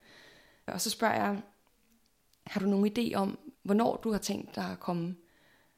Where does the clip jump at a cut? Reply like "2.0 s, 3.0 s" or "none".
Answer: 0.7 s, 3.4 s